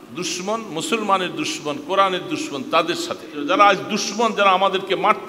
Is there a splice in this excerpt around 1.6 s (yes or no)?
no